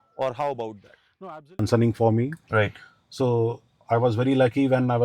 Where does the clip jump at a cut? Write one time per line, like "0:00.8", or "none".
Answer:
0:01.5